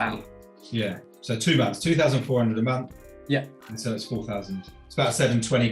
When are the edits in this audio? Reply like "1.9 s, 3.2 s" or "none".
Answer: 4.7 s